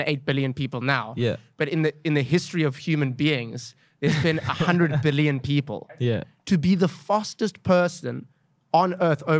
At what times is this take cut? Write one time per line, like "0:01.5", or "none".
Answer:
0:05.9